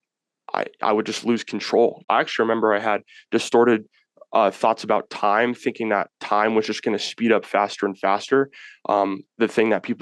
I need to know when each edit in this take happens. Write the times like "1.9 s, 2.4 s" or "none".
2.0 s